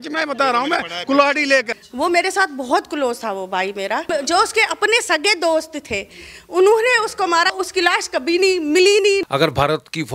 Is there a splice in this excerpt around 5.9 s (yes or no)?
no